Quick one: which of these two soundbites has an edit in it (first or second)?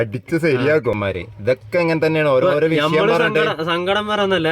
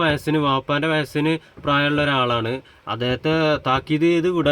first